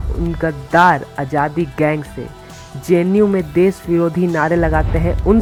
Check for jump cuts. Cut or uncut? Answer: uncut